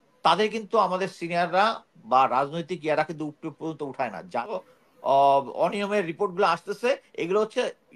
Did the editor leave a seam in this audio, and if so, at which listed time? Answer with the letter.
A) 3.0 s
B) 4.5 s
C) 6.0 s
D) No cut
B